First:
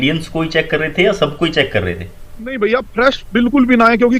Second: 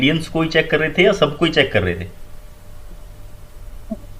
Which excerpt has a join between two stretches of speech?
first; 1 cut; at 2.6 s

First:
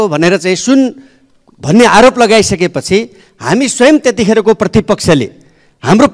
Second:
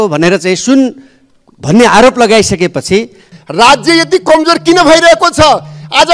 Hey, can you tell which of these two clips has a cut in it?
second; 1 cut; at 3.3 s

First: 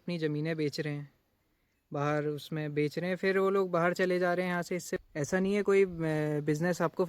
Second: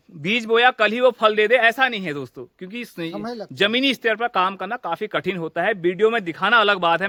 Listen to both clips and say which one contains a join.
first; 1 cut; at 5.0 s

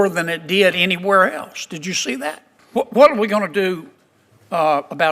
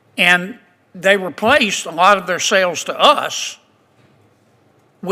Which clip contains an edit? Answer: first; 1 cut; at 2.5 s

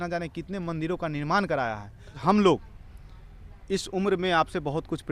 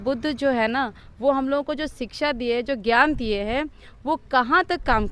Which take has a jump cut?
first; 1 cut; at 2.2 s

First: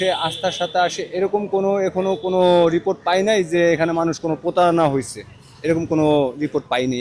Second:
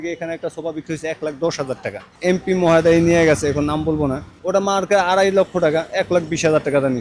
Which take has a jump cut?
second; 2 cuts; at 2.1 s, 4.3 s

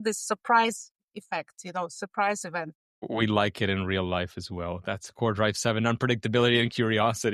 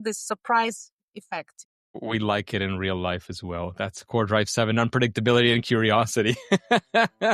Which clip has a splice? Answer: second; 1 cut; at 1.6 s

